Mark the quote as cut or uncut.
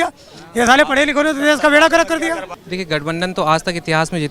cut